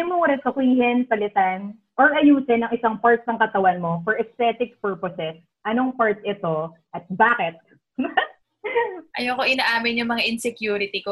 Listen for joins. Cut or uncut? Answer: cut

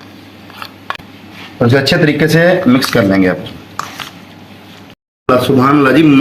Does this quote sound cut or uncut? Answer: cut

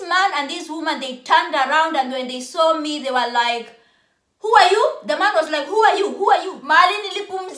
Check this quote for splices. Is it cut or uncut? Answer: cut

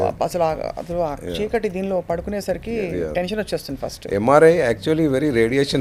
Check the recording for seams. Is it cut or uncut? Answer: uncut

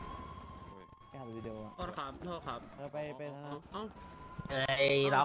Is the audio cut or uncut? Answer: uncut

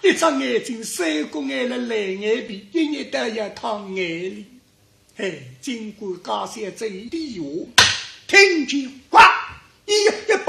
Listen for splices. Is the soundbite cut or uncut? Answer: uncut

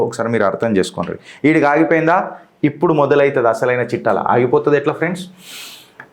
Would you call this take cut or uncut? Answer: uncut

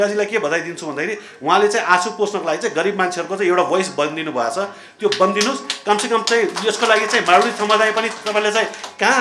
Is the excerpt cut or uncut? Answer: uncut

